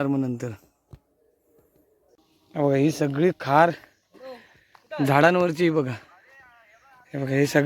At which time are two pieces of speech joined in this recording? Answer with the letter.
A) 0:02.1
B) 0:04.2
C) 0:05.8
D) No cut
A